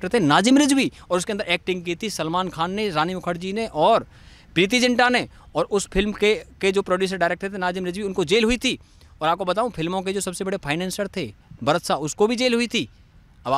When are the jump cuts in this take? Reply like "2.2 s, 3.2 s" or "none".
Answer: none